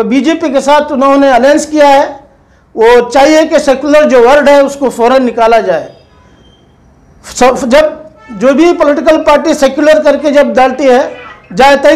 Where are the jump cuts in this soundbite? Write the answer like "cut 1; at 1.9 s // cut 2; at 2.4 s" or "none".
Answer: none